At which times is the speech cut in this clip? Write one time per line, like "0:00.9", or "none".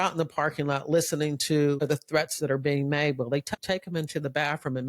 0:01.8
0:03.5